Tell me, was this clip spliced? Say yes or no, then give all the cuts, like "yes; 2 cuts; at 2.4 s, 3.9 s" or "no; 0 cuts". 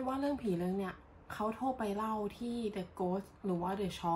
no; 0 cuts